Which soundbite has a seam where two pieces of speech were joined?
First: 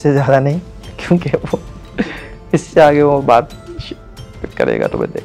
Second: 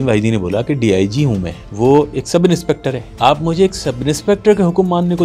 second; 2 cuts; at 1.6 s, 3.1 s

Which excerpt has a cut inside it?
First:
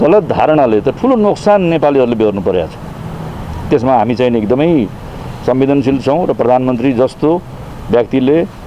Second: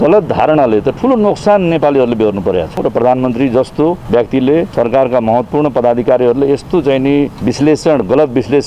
second; 4 cuts; at 2.8 s, 4.0 s, 4.7 s, 7.4 s

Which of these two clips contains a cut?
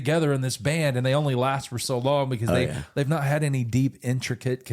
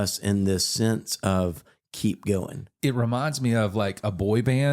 second; 1 cut; at 2.7 s

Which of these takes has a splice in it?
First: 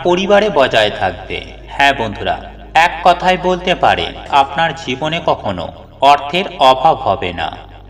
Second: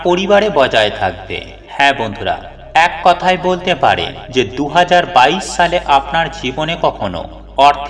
first; 1 cut; at 4.3 s

